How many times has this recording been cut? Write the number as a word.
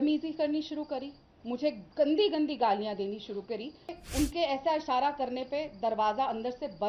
one